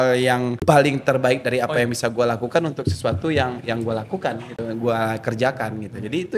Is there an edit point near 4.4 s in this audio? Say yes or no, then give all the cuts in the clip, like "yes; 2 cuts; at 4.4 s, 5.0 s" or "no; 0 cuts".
no; 0 cuts